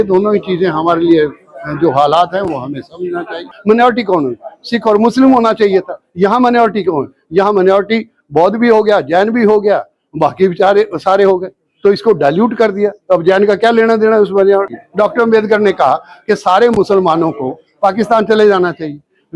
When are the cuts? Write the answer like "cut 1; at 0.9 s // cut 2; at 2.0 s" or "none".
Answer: cut 1; at 3.4 s // cut 2; at 14.8 s